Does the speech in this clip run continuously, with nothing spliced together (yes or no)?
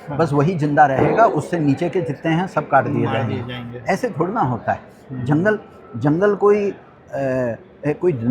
yes